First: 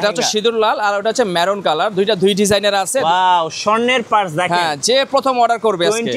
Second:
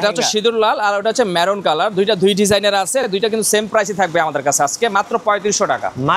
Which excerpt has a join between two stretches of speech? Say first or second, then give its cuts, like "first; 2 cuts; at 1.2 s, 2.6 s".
first; 1 cut; at 3.0 s